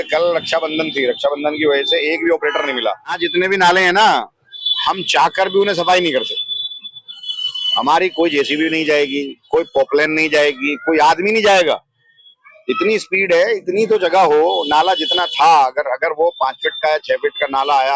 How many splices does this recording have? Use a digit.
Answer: 1